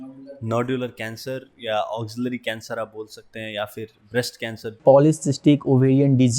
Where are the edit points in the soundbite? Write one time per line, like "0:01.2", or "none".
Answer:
0:04.8